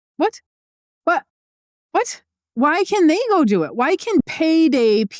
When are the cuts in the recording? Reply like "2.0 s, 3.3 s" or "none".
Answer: 4.2 s